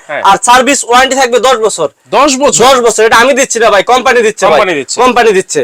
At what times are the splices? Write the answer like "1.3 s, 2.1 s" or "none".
none